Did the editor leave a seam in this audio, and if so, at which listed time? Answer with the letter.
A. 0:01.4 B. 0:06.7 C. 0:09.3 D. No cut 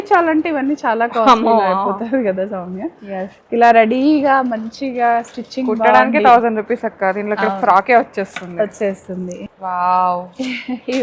C